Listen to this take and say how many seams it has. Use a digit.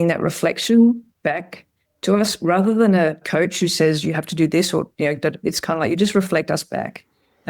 1